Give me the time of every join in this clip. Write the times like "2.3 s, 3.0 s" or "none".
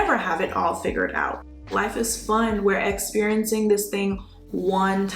1.7 s